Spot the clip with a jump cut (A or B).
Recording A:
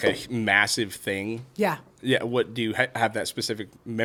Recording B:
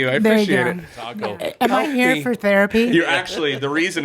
B